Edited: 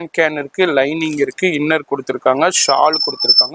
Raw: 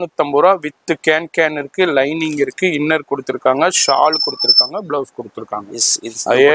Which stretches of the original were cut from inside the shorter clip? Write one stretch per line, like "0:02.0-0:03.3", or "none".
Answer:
none